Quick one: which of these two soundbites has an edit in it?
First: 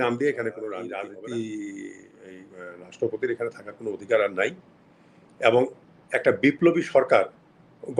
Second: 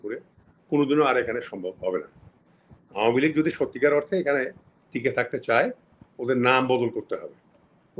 first; 1 cut; at 1.0 s

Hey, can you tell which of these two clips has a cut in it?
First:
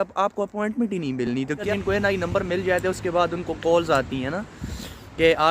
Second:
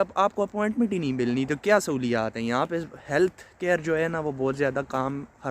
first; 1 cut; at 1.6 s

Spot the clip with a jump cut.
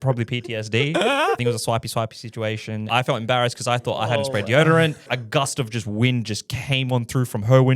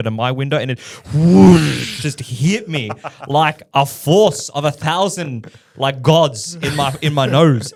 first; 3 cuts; at 1.4 s, 2.8 s, 5.2 s

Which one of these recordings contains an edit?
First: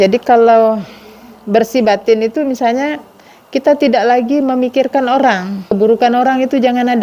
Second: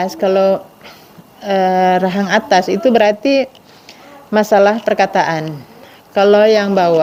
first; 1 cut; at 5.7 s

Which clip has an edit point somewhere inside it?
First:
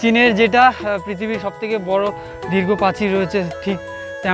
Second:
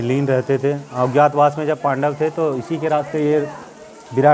second; 1 cut; at 0.9 s

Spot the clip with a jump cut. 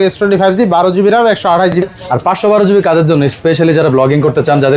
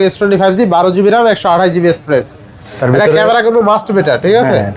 first; 1 cut; at 1.8 s

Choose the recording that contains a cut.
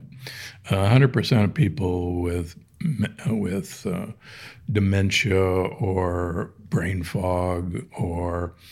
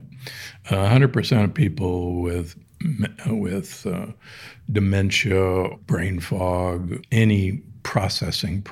second; 2 cuts; at 5.8 s, 7.0 s

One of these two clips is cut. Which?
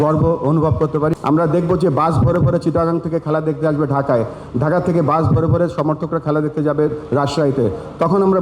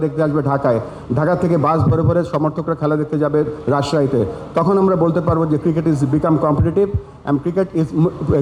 first; 1 cut; at 1.1 s

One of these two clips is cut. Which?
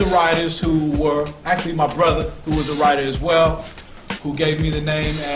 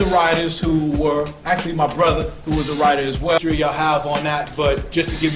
first; 1 cut; at 3.4 s

